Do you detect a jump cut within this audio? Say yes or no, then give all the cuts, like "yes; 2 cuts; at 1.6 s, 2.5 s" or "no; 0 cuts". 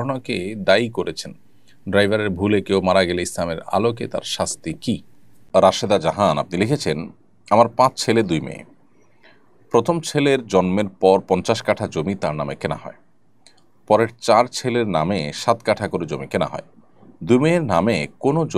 yes; 1 cut; at 5.3 s